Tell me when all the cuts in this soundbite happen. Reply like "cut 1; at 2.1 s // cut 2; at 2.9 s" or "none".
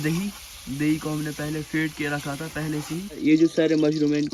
cut 1; at 3.2 s